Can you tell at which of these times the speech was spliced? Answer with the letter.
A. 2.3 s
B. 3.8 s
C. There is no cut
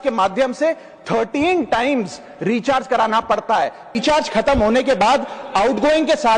B